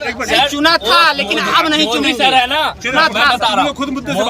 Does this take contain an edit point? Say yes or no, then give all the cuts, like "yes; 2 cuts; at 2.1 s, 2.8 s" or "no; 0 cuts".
no; 0 cuts